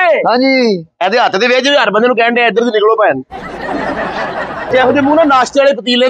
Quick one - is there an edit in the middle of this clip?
yes; 1 cut; at 4.7 s

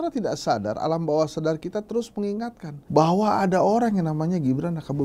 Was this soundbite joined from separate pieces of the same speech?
no; 0 cuts

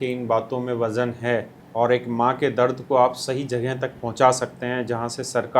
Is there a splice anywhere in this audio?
yes; 1 cut; at 1.6 s

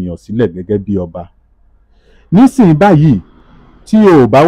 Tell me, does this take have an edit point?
no; 0 cuts

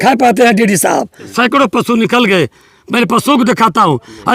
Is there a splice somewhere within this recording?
yes; 1 cut; at 1.3 s

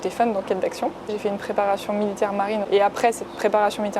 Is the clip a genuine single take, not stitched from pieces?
no; 2 cuts; at 1.1 s, 2.7 s

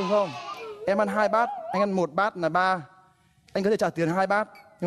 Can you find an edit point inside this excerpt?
no; 0 cuts

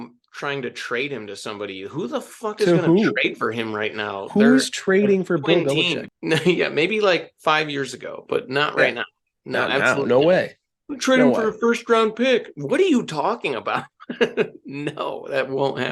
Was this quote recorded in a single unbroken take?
yes; 0 cuts

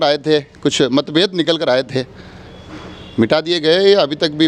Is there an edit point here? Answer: no; 0 cuts

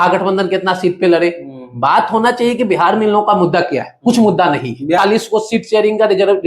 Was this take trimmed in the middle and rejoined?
yes; 1 cut; at 5.0 s

